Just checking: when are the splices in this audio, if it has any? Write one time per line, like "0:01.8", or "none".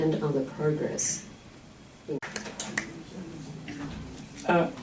none